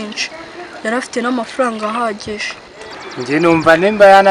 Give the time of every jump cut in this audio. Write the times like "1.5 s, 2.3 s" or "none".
3.1 s